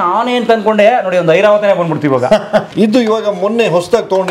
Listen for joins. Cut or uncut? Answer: cut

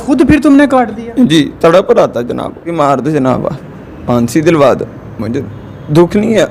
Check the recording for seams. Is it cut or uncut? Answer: cut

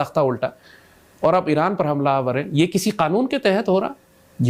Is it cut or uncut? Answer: uncut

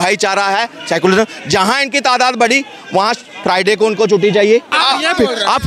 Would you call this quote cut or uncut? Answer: cut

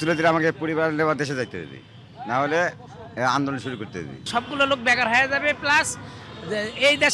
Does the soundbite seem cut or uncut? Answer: uncut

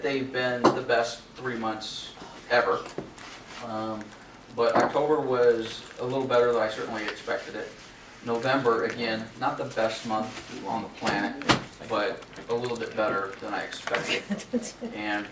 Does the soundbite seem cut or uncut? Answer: cut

